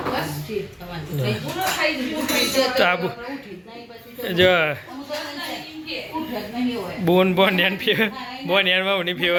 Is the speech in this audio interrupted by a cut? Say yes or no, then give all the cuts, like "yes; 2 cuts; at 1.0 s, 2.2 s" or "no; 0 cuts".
no; 0 cuts